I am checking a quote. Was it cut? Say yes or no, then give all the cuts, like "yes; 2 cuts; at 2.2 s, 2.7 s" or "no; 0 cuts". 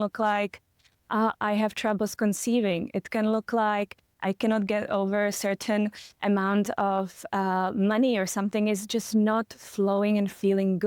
no; 0 cuts